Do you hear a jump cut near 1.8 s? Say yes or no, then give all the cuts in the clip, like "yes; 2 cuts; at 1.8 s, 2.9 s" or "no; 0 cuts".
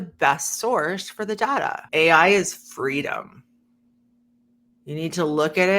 yes; 1 cut; at 1.8 s